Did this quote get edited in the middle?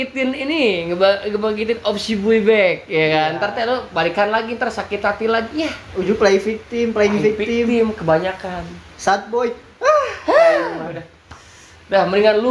no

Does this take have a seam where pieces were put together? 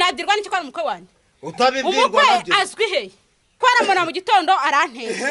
yes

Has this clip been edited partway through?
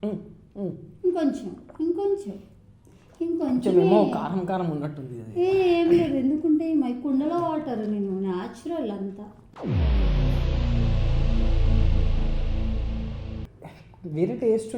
yes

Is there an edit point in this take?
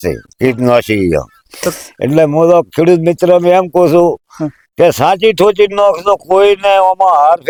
no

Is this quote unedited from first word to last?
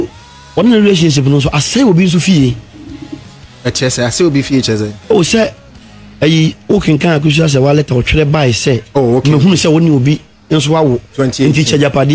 yes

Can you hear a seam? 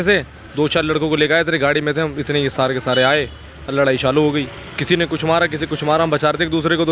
no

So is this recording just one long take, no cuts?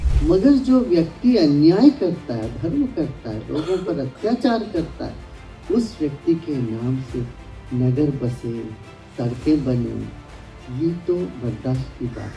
yes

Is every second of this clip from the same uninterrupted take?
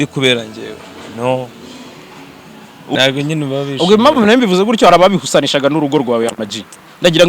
no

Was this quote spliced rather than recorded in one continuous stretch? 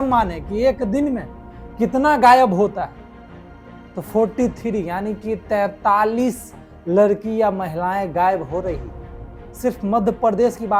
no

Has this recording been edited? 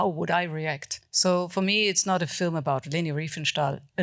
no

